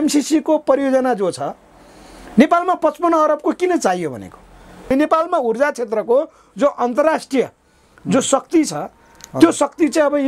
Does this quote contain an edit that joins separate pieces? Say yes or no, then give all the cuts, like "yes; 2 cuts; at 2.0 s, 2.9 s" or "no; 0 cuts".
yes; 1 cut; at 4.7 s